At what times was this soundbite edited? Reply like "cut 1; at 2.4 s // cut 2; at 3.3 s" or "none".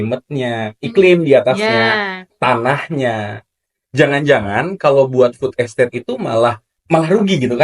cut 1; at 6.7 s